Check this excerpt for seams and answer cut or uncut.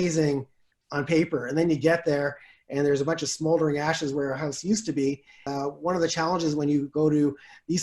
cut